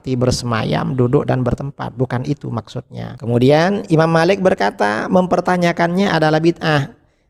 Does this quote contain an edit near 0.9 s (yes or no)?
no